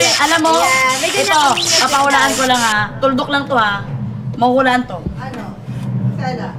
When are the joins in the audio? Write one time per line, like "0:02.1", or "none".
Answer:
none